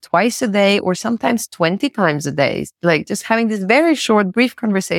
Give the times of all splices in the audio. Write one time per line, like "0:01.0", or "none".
none

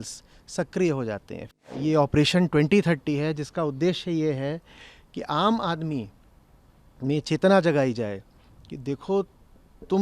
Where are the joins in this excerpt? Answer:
0:01.4

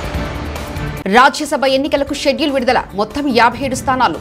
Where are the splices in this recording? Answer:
0:01.0

